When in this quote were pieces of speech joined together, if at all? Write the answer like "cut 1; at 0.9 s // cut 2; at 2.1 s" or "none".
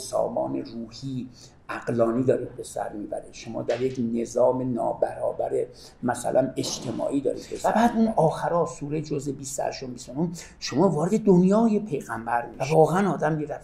cut 1; at 7.5 s // cut 2; at 12.5 s